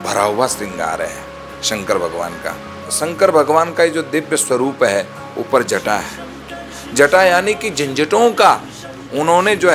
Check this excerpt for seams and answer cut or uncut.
cut